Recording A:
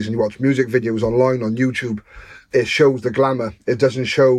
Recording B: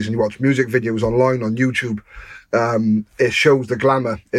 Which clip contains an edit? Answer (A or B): A